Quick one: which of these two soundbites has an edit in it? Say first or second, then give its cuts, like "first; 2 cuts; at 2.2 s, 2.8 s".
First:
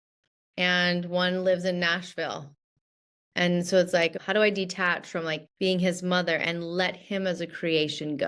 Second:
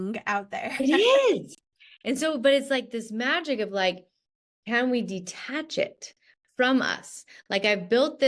first; 2 cuts; at 4.1 s, 5.4 s